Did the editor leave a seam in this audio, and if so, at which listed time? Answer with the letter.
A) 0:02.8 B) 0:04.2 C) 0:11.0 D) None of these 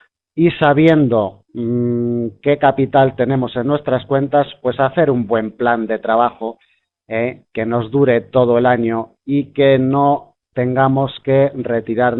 B